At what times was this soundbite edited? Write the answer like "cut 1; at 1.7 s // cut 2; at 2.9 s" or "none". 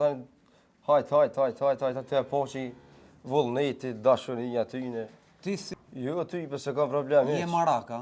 cut 1; at 5.7 s